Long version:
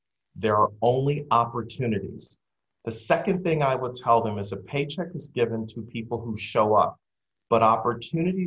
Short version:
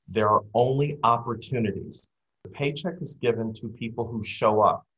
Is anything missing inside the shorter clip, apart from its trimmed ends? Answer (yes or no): yes